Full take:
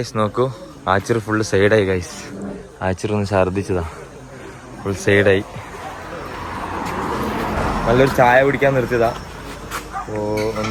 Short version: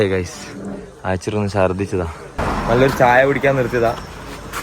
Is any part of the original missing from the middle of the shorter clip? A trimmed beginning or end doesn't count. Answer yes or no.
yes